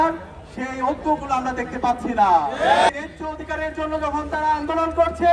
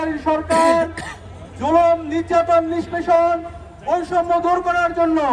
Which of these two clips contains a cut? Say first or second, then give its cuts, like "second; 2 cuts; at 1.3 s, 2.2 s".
first; 1 cut; at 2.9 s